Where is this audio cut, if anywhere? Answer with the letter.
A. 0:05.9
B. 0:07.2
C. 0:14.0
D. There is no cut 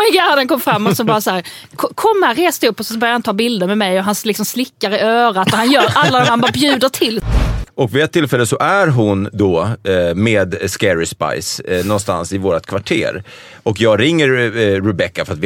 B